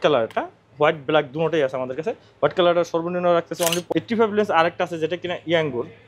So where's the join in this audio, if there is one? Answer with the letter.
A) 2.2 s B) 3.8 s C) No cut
B